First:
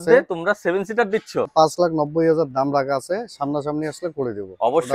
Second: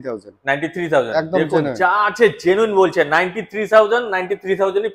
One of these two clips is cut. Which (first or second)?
first